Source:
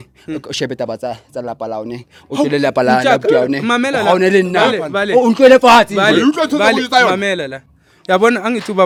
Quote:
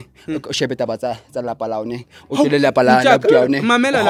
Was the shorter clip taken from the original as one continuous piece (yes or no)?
yes